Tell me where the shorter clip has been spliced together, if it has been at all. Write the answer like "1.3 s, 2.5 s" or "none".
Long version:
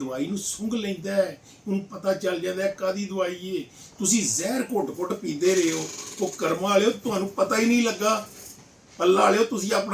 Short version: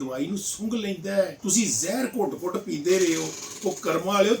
1.4 s